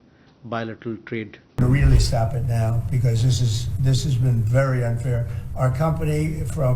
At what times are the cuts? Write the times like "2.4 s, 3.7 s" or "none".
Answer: 1.6 s